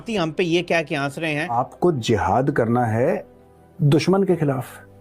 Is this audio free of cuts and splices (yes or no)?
no